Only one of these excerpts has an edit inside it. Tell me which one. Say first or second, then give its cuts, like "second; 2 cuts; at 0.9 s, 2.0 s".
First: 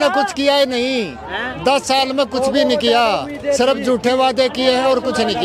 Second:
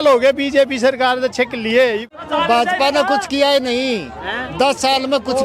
second; 1 cut; at 2.0 s